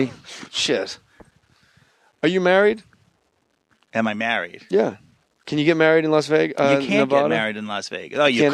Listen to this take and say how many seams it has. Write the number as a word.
one